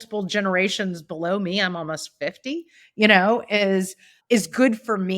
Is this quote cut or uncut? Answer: cut